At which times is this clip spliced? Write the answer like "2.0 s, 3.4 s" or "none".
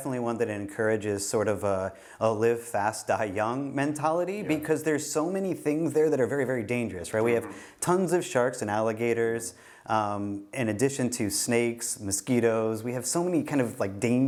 none